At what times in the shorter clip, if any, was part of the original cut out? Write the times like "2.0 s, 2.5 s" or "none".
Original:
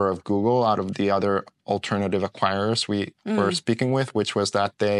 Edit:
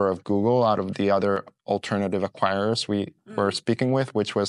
none

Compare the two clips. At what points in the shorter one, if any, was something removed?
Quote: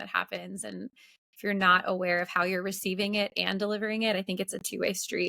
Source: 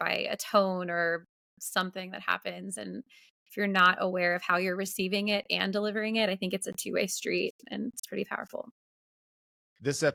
none

